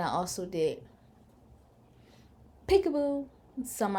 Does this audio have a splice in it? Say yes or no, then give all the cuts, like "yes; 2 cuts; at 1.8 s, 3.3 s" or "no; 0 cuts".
no; 0 cuts